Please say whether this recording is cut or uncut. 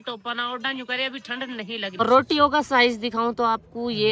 cut